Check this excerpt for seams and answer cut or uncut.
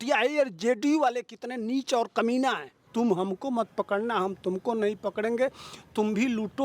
cut